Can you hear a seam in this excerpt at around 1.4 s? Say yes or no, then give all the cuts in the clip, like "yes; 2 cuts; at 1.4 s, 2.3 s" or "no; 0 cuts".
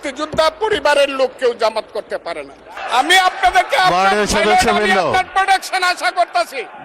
no; 1 cut; at 2.7 s